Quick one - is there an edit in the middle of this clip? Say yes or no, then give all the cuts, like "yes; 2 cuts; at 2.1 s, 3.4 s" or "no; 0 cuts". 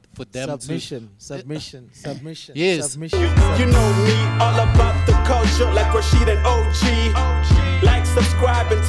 yes; 1 cut; at 3.0 s